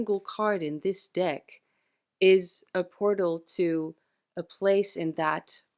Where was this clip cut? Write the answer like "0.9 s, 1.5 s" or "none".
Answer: none